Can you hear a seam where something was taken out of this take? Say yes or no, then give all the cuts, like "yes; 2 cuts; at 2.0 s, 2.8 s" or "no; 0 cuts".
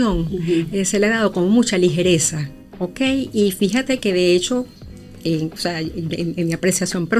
no; 0 cuts